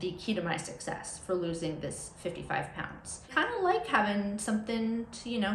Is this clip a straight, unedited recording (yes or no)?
no